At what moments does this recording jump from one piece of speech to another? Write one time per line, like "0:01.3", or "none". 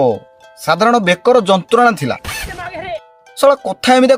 none